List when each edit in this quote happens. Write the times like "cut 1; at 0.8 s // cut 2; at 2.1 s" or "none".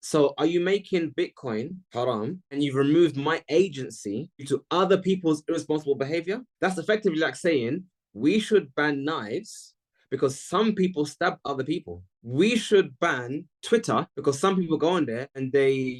none